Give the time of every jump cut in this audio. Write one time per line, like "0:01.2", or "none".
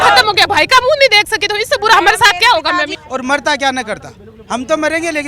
0:03.0